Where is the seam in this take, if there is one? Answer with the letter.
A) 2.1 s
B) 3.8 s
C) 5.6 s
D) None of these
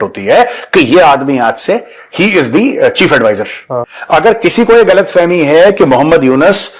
B